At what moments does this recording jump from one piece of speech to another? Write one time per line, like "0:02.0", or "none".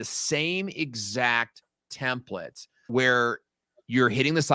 0:02.7